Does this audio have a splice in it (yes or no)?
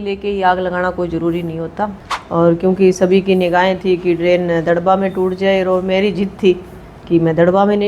yes